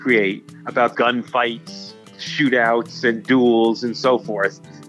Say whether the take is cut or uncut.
cut